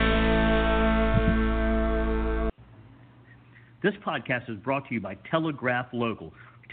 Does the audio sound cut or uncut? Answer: cut